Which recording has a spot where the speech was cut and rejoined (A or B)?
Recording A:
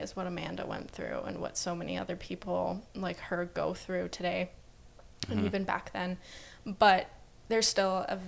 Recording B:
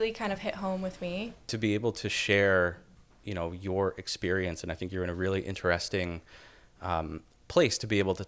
B